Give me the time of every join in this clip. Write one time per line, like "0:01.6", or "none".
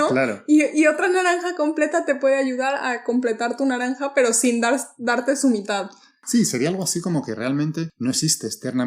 0:06.2
0:07.9